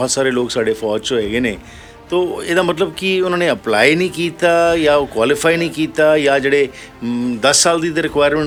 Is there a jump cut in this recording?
no; 0 cuts

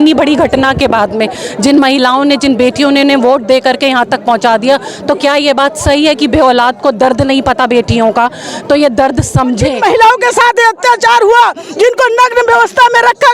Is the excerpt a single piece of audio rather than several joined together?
no; 1 cut; at 9.7 s

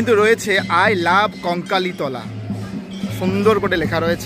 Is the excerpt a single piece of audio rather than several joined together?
yes; 0 cuts

